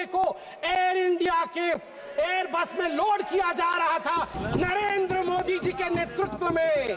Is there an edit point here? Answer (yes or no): yes